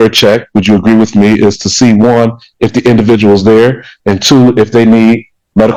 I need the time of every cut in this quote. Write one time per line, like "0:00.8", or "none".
none